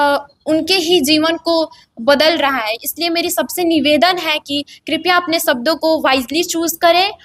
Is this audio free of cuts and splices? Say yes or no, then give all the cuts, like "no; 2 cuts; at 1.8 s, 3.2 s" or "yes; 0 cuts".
yes; 0 cuts